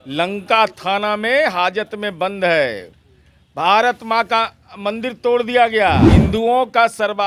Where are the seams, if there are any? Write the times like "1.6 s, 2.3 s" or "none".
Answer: 6.1 s

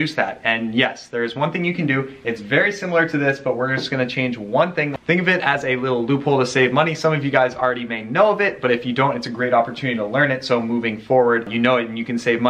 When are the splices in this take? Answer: 11.5 s

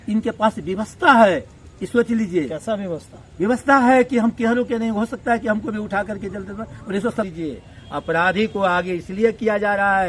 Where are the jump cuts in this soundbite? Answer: 7.3 s

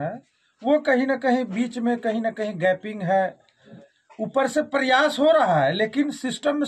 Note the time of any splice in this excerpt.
none

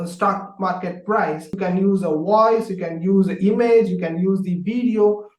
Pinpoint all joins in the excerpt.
1.5 s

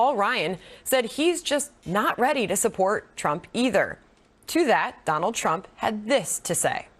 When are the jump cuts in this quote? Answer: 4.5 s

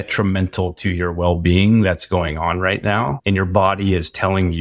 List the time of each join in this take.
3.2 s

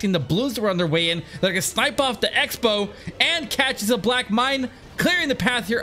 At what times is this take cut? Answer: none

